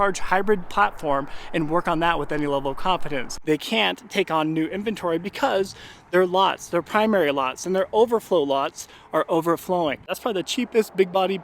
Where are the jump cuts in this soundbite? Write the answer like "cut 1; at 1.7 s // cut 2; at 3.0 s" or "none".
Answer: cut 1; at 3.3 s // cut 2; at 10.1 s